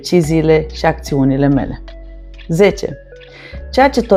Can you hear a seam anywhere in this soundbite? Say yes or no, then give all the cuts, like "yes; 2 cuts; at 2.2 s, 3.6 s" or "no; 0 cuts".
no; 0 cuts